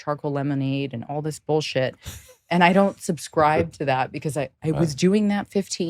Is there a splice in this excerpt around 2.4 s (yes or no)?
no